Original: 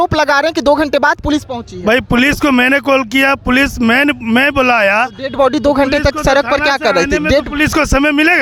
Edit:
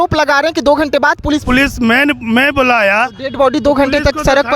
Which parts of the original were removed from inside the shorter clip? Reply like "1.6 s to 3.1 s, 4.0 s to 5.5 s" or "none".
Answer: 1.4 s to 3.4 s